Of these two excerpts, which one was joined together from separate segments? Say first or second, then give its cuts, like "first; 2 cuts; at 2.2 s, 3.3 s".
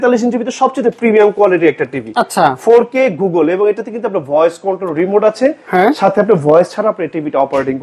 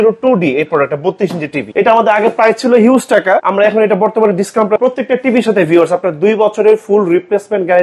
second; 3 cuts; at 1.7 s, 3.5 s, 4.8 s